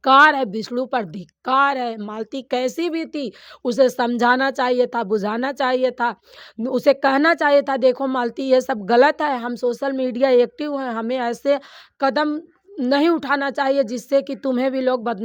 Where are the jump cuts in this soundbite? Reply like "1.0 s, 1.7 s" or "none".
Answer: none